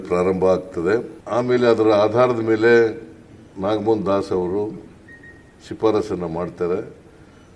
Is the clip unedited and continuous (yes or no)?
no